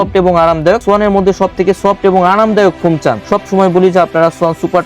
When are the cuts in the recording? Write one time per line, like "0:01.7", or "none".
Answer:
0:00.8
0:03.2